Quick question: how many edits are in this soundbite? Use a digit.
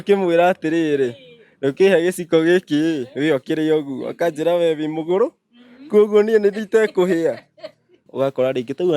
1